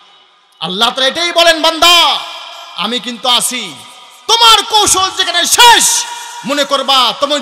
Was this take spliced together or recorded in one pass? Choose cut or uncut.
uncut